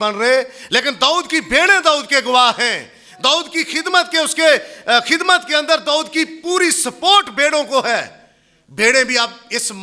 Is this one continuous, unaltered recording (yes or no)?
yes